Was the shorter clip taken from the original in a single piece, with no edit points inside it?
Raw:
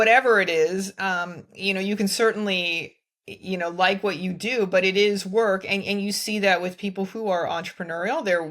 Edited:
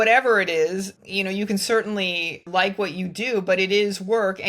no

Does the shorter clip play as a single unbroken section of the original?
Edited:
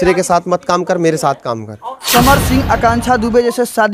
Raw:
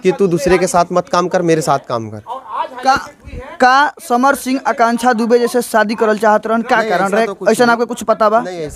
no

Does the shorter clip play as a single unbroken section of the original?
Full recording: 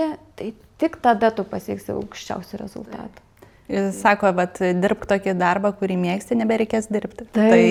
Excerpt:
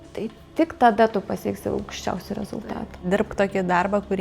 no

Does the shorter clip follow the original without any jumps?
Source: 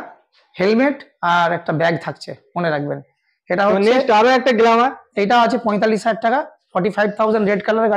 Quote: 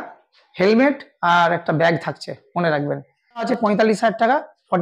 no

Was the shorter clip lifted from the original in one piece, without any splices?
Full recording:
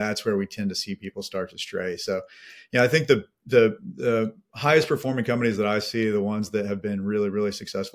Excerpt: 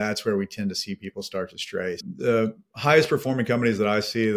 no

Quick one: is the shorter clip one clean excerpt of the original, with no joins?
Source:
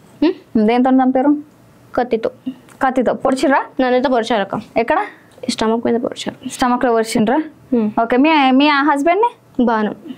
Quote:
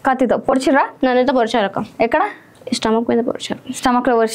yes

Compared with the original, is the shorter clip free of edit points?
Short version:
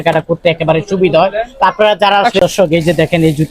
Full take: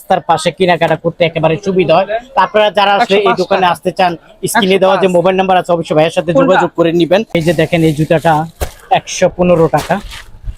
no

